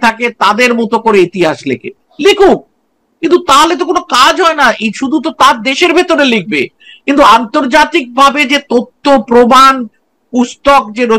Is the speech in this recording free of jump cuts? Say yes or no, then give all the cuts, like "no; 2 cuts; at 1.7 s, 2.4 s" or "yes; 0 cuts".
yes; 0 cuts